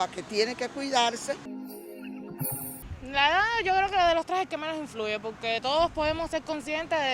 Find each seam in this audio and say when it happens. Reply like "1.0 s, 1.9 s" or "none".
1.6 s, 2.8 s